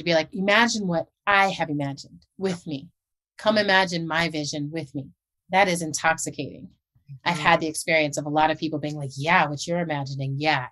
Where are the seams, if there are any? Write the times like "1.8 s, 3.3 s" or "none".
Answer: 5.4 s, 7.0 s